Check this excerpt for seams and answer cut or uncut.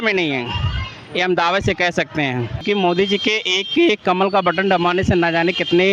cut